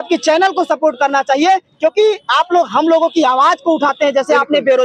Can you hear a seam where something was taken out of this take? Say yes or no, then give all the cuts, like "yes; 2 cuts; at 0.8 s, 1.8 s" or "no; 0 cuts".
no; 0 cuts